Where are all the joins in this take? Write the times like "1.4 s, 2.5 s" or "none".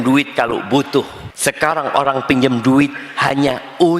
1.2 s